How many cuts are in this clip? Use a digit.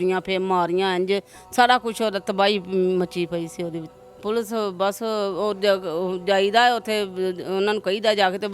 1